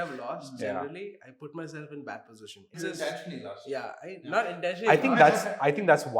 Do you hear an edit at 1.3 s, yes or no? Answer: no